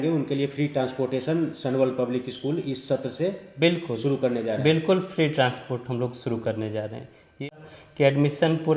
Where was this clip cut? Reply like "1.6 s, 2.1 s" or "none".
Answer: 7.4 s